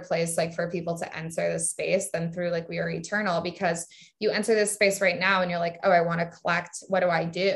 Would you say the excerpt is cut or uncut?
uncut